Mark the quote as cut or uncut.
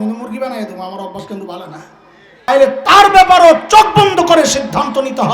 cut